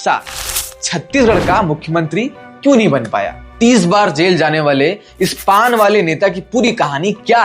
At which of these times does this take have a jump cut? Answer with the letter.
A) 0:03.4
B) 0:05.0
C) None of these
A